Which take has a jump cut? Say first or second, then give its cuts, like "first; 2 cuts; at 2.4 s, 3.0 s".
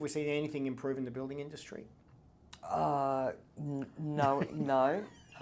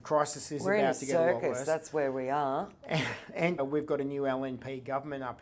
second; 1 cut; at 3.6 s